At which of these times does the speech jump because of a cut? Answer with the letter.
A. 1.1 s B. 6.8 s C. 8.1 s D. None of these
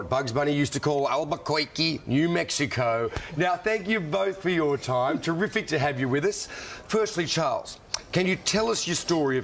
D